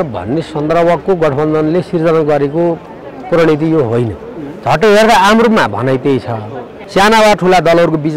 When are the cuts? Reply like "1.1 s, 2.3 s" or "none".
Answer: 6.8 s

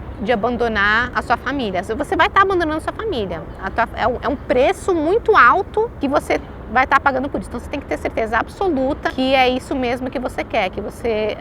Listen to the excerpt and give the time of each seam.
1.1 s, 5.9 s, 9.1 s

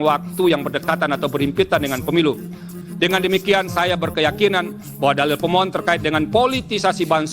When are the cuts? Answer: 2.7 s

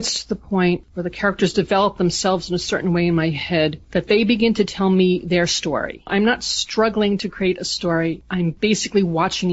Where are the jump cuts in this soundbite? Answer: 6.0 s

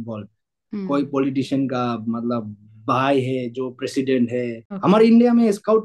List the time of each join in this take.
4.6 s

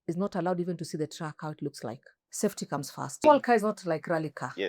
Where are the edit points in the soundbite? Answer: 2.2 s, 3.2 s

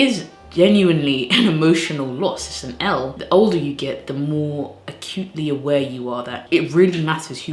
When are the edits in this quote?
3.1 s, 6.3 s

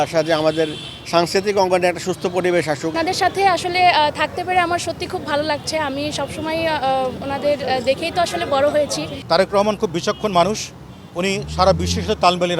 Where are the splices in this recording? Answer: 2.9 s, 9.1 s

